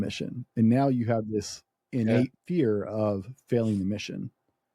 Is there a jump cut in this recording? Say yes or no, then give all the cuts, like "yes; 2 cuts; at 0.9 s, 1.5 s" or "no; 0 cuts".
yes; 1 cut; at 2.4 s